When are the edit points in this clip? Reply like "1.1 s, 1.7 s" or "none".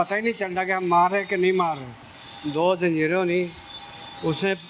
2.1 s